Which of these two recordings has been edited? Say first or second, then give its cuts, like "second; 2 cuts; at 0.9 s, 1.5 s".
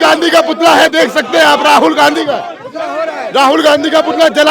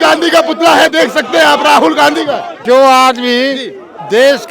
second; 1 cut; at 2.6 s